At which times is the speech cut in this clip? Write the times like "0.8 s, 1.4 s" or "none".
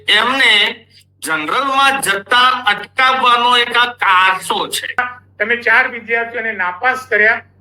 5.0 s